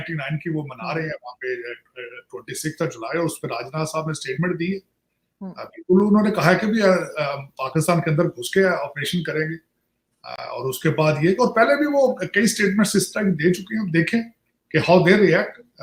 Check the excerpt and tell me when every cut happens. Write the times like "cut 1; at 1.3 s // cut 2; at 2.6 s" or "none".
none